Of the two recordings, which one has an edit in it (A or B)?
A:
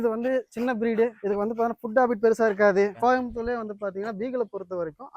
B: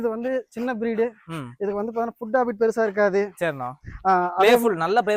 A